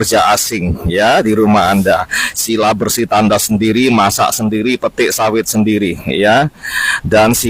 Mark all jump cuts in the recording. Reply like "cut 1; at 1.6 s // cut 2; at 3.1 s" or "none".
none